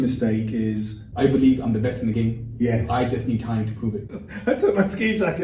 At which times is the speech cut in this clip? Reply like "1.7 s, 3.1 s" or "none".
1.0 s, 4.0 s